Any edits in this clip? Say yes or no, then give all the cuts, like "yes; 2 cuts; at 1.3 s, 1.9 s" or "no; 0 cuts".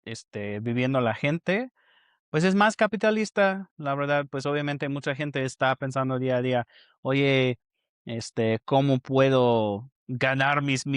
no; 0 cuts